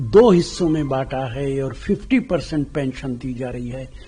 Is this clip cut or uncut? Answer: uncut